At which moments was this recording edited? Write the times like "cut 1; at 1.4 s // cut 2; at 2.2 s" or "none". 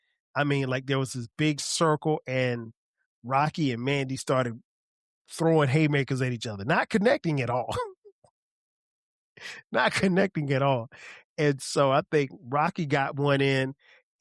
none